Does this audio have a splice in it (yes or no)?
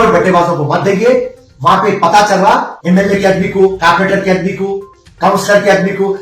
yes